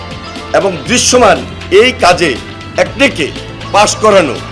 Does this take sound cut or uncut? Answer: cut